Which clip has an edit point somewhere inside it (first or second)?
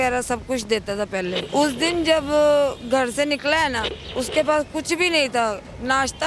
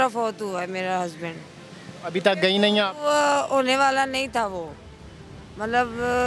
first